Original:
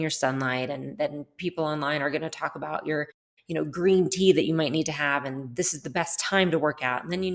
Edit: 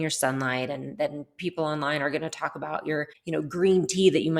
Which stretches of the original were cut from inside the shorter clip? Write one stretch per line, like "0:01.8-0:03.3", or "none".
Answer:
0:03.2-0:03.4